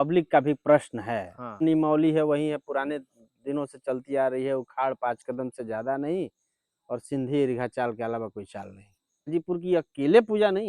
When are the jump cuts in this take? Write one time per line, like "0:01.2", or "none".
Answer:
0:01.6
0:09.3